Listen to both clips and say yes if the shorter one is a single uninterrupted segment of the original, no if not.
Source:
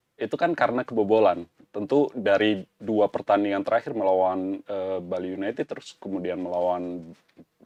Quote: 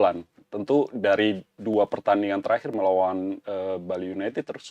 yes